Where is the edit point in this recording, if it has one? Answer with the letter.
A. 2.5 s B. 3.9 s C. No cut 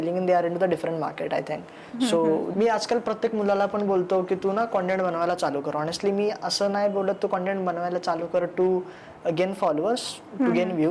A